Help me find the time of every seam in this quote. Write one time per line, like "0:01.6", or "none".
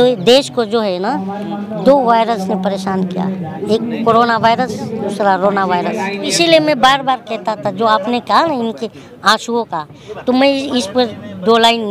0:03.5
0:06.3